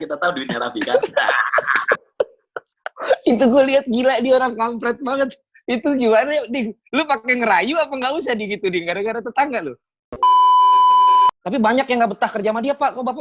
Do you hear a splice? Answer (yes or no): yes